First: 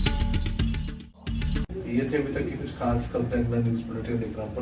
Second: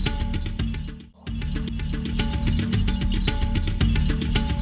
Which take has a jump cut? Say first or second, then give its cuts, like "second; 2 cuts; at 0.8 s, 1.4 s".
second; 1 cut; at 1.5 s